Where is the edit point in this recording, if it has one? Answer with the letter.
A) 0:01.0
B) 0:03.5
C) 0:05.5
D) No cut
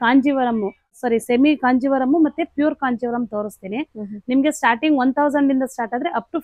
A